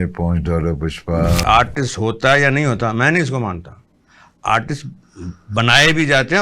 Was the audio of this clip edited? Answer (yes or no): yes